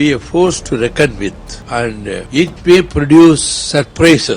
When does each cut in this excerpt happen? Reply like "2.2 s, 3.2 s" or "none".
1.8 s